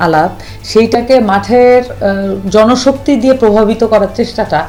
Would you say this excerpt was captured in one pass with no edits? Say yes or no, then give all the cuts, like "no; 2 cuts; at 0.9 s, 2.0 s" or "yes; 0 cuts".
yes; 0 cuts